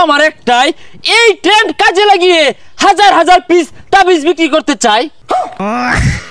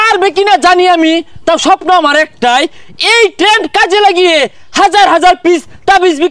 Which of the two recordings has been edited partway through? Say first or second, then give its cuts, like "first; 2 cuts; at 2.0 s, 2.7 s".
first; 1 cut; at 5.3 s